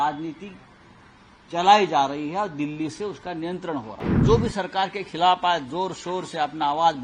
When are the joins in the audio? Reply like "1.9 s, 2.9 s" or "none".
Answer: 4.2 s